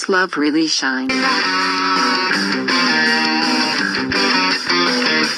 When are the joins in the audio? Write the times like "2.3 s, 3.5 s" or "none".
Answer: 1.1 s